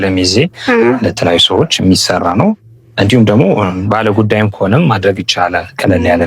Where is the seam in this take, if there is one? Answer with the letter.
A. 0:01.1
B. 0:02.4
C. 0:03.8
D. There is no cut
D